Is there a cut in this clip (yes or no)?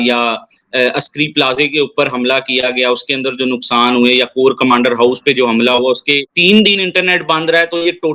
yes